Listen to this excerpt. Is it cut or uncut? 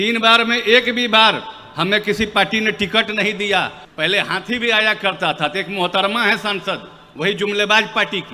cut